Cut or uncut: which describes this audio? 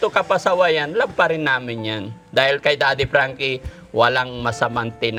uncut